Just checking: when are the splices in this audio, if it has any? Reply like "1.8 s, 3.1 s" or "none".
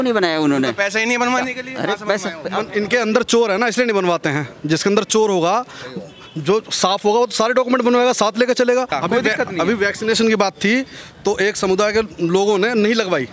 2.4 s, 9.0 s